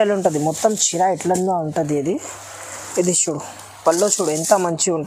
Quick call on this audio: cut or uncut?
uncut